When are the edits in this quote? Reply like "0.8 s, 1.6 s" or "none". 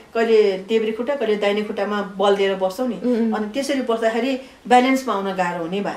none